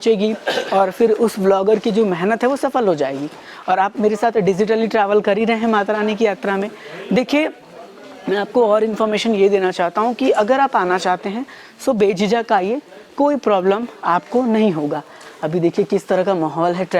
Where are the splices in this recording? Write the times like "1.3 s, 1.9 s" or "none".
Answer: none